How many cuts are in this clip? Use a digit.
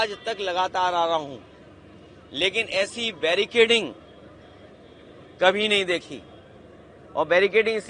0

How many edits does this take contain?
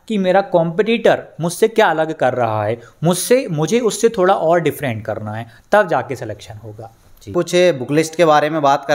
1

